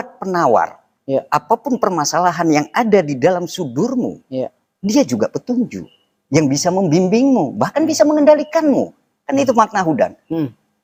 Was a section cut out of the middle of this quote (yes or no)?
no